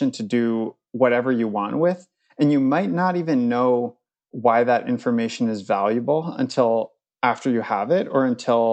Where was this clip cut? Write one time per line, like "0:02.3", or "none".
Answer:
none